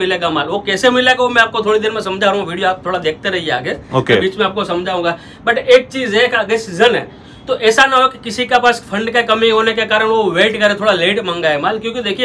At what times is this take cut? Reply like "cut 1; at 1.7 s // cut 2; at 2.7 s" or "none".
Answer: none